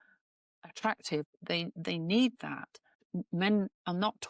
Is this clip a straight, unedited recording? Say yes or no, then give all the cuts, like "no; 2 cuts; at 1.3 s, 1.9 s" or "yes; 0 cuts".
no; 2 cuts; at 1.3 s, 3.1 s